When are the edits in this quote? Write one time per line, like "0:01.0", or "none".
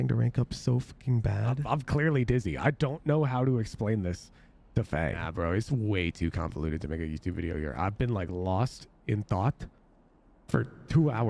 0:01.6
0:05.3